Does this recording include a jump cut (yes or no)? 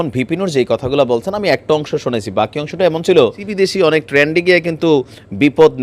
yes